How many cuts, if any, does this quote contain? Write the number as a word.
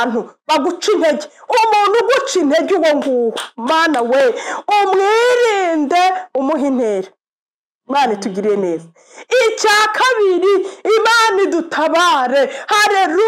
zero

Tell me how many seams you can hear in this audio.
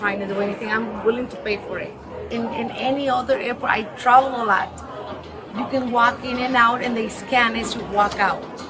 one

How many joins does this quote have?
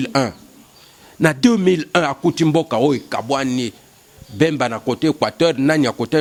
zero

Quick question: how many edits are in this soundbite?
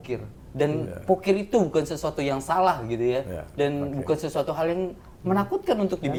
zero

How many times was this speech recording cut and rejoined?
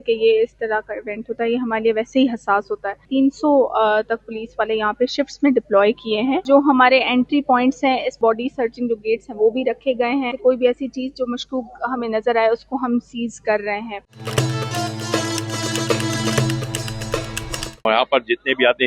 six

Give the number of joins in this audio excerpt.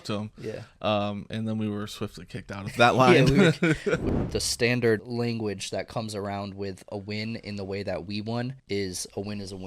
three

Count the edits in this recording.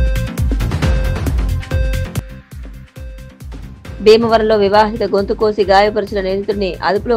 zero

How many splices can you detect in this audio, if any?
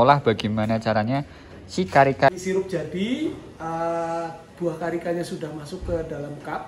one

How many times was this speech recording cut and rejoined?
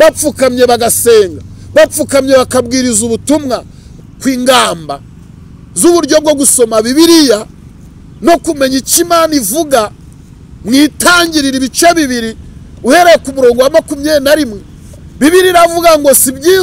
one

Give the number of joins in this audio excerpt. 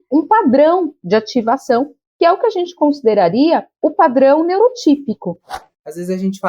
one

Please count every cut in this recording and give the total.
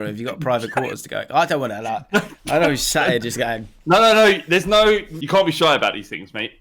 one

